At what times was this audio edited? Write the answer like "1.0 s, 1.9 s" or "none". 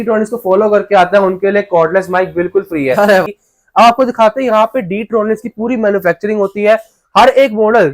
3.3 s